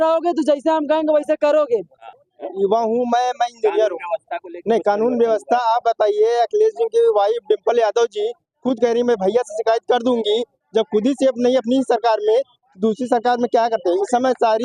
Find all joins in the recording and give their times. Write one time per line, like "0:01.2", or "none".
0:02.0